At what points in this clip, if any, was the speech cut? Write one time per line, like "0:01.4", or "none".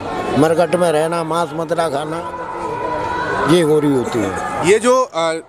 none